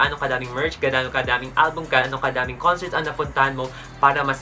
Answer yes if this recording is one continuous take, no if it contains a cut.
yes